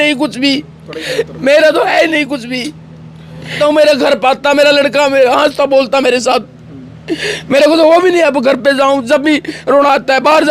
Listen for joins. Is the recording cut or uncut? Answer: cut